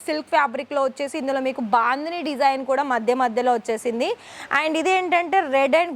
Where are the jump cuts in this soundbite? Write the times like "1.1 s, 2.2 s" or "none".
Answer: none